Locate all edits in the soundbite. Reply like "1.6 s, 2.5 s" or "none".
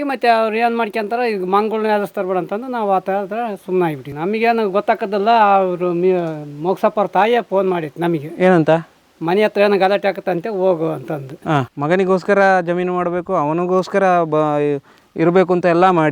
4.1 s, 11.7 s

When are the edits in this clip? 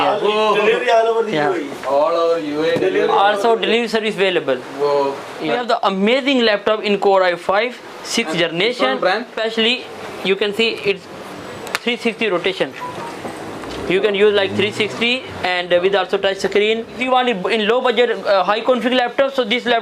5.6 s, 9.4 s, 16.9 s

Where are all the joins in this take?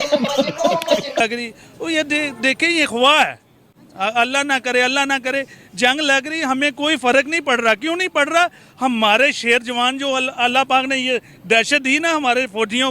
1.2 s

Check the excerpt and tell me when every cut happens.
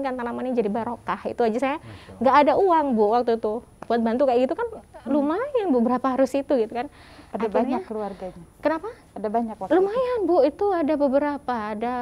none

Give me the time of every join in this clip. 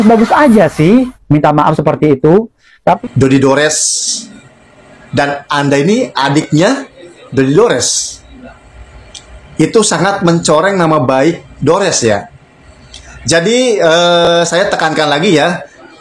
3.0 s

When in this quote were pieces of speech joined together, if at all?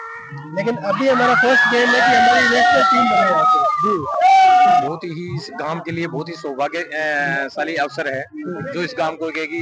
4.8 s

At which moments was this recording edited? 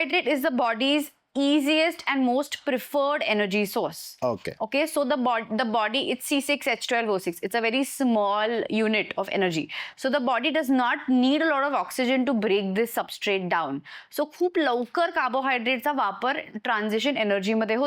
none

